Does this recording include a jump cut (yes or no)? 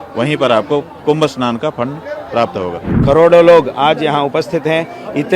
yes